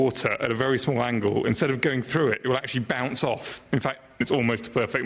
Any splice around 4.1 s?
yes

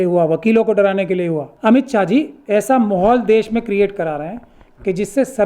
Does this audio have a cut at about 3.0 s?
no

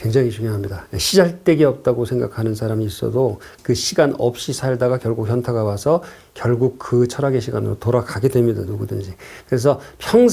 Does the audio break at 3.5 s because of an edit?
yes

